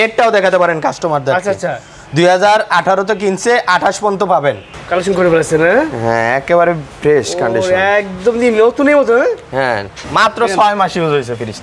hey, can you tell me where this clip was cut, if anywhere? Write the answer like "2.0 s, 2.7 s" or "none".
4.7 s, 10.0 s